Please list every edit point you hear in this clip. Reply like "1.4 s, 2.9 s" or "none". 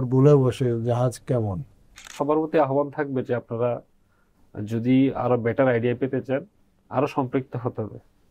2.1 s